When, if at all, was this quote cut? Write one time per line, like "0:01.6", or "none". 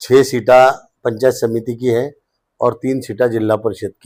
none